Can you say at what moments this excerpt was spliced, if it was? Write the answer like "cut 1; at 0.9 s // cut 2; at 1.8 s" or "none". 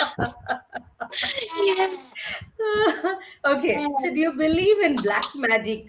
none